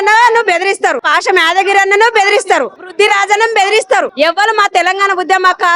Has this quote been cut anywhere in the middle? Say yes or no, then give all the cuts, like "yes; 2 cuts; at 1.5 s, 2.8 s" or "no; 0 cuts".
yes; 3 cuts; at 1.1 s, 2.9 s, 4.1 s